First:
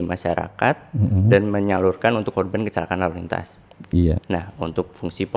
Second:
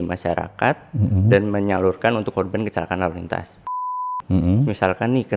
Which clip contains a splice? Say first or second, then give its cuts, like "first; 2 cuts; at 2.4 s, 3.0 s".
second; 1 cut; at 3.9 s